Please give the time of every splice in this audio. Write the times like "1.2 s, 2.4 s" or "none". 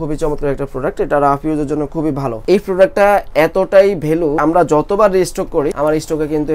2.4 s, 4.4 s, 5.8 s